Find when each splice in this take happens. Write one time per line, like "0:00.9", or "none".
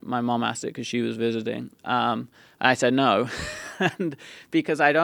none